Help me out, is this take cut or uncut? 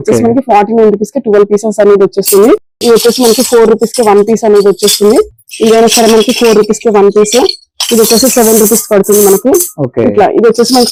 uncut